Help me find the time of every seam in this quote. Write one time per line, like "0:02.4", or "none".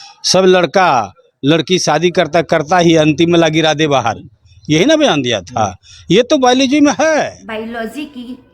0:07.4